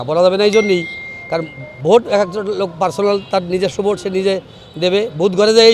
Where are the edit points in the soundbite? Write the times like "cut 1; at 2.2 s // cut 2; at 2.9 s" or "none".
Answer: none